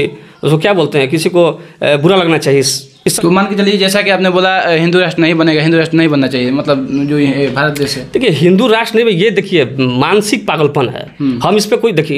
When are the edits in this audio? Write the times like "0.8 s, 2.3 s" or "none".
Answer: 3.1 s